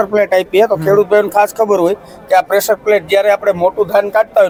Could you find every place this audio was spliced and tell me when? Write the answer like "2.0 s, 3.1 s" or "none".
none